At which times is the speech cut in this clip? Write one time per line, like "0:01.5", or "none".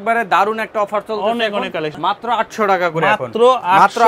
0:01.9

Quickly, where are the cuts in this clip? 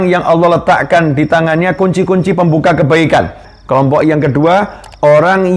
0:03.5

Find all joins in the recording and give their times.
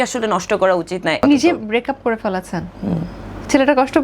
0:01.2

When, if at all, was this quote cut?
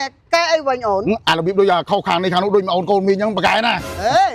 none

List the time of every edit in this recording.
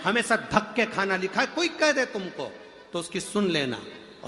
none

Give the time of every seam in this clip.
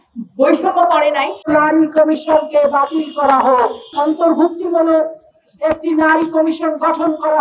0:01.3
0:03.9

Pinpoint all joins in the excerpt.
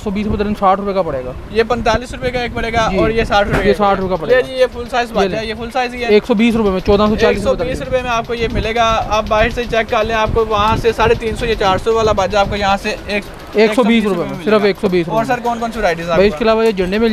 none

